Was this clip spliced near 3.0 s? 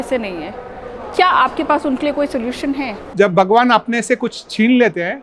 yes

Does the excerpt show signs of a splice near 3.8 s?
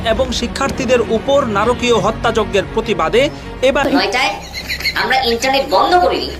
yes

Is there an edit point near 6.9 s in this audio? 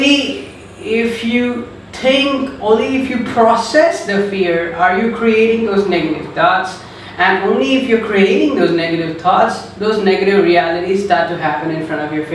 no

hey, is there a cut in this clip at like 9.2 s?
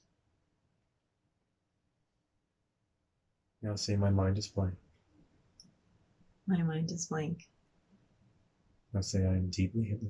no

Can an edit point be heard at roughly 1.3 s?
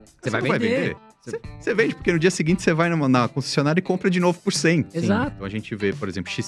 no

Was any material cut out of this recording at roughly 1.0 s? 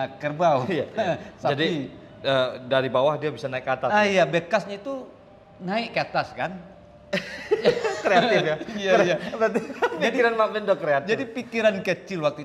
no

